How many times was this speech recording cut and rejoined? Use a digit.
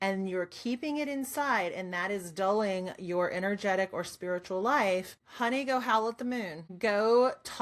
2